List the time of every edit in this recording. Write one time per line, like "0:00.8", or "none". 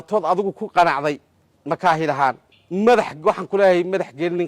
0:02.5